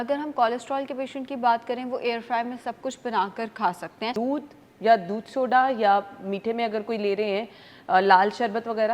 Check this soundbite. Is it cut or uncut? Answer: cut